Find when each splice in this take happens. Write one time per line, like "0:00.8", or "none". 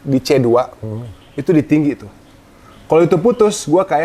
none